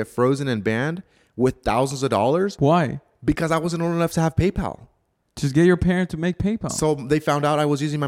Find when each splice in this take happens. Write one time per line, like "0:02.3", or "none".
none